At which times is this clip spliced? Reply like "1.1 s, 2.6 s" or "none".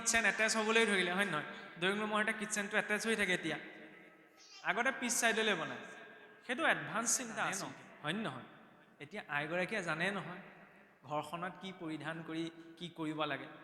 7.6 s